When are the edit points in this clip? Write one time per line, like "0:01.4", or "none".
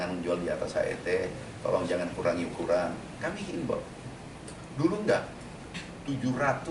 0:05.7